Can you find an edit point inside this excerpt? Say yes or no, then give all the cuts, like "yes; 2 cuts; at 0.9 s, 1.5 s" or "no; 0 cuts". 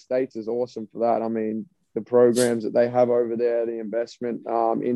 no; 0 cuts